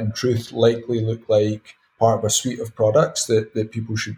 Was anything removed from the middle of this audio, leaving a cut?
no; 0 cuts

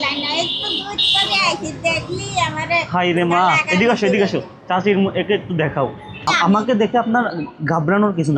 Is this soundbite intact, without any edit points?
no; 1 cut; at 6.2 s

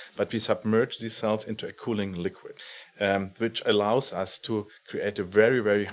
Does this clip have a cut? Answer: yes; 1 cut; at 2.6 s

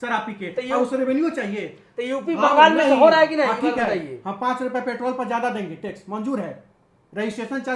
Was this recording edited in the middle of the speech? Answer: no; 0 cuts

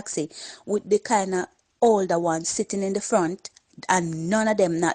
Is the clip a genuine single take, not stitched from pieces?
no; 1 cut; at 3.7 s

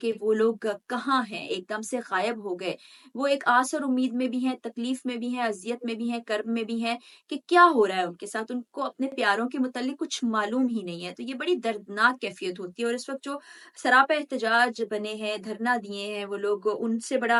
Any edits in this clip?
no; 0 cuts

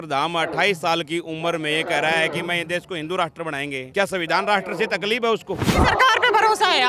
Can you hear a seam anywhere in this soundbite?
yes; 2 cuts; at 3.8 s, 5.6 s

